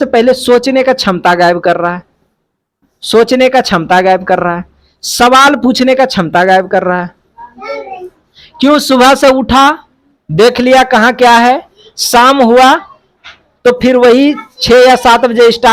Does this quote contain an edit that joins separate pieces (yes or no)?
no